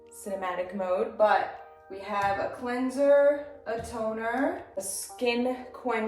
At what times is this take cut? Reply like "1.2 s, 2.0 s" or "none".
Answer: none